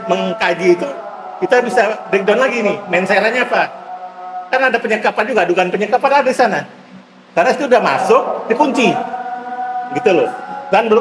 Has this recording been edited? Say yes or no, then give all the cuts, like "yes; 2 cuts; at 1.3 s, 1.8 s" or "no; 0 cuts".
no; 0 cuts